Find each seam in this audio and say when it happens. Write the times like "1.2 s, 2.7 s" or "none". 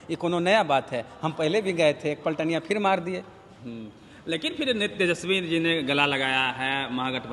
none